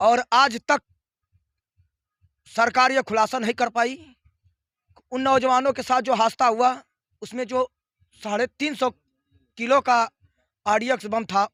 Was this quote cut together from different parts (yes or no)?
no